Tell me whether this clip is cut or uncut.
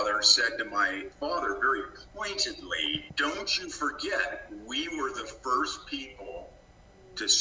cut